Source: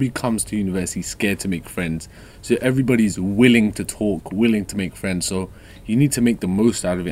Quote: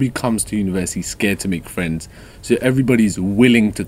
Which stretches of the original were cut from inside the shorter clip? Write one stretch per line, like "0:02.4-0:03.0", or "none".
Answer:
none